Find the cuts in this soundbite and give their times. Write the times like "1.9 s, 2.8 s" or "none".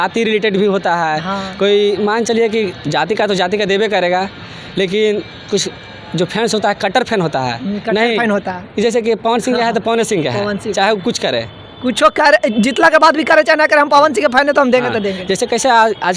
none